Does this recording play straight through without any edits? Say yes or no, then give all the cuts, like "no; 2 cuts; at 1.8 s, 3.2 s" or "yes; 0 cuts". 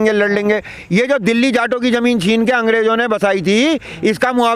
yes; 0 cuts